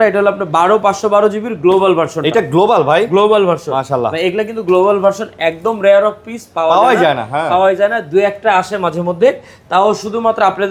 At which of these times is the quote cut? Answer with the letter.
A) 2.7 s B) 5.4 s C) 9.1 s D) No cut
D